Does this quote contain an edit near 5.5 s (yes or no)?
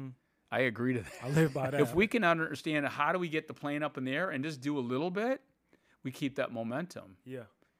no